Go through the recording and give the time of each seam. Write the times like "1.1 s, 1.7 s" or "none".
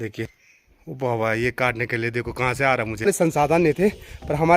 3.1 s